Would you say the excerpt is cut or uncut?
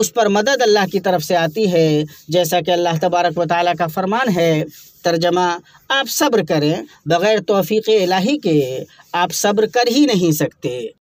uncut